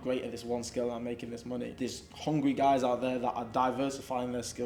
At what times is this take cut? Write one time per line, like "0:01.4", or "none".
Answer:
0:01.7